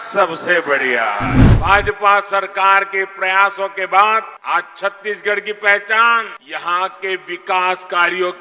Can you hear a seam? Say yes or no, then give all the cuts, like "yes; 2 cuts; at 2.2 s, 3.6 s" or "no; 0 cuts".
yes; 3 cuts; at 1.5 s, 4.3 s, 6.4 s